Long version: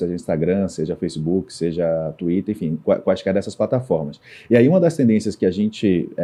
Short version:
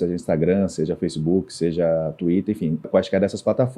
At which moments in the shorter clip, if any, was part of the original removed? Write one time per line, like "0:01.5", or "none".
0:02.8